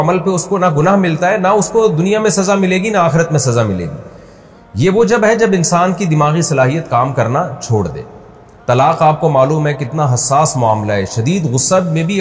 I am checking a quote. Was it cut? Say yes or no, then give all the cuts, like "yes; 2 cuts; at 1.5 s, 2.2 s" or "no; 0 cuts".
no; 0 cuts